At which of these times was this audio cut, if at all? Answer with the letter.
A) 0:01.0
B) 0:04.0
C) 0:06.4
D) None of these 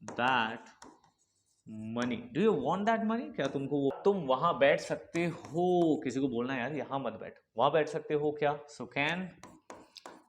B